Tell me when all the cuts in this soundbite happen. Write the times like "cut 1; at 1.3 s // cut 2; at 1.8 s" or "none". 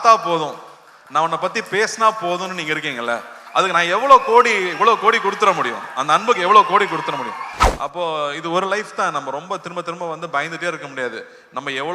cut 1; at 7.6 s